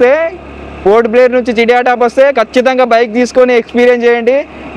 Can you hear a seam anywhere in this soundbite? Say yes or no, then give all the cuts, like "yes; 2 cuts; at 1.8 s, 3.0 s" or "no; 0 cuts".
no; 0 cuts